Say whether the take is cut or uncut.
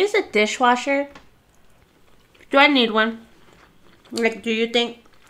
uncut